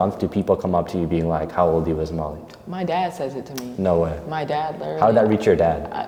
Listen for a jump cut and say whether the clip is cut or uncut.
uncut